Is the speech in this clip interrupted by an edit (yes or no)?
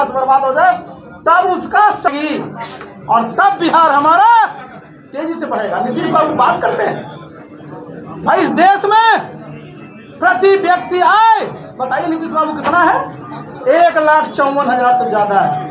yes